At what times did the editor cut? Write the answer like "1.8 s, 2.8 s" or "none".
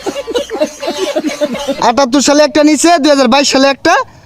1.3 s